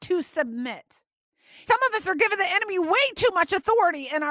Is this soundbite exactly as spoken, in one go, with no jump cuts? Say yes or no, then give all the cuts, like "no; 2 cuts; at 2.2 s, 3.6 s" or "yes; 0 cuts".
no; 1 cut; at 1.6 s